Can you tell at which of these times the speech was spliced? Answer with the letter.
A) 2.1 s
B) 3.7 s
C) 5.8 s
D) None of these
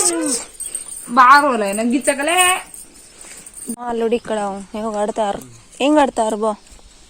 B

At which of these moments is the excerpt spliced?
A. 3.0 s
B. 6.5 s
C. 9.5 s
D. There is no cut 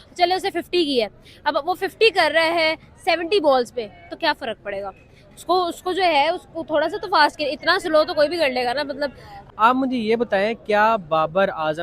C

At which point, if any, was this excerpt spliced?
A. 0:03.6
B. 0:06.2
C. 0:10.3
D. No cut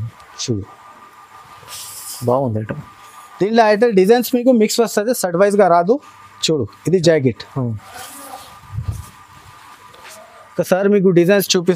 D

